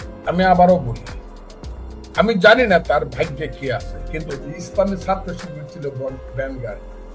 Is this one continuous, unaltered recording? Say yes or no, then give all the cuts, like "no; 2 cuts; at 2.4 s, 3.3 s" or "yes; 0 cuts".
no; 1 cut; at 4.3 s